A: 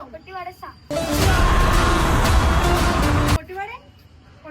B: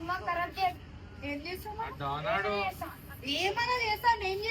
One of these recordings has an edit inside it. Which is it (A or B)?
A